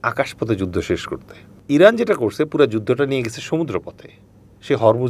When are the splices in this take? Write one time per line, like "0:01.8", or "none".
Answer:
0:01.5